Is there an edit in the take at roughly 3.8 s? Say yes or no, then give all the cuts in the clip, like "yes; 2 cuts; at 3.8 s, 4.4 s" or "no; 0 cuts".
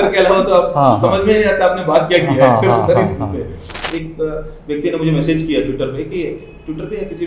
yes; 1 cut; at 3.8 s